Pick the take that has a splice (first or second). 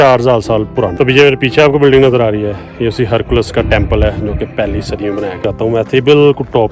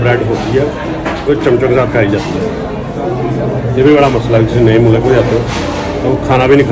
first